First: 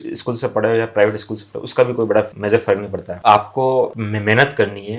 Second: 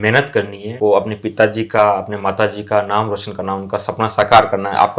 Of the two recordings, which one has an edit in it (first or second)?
first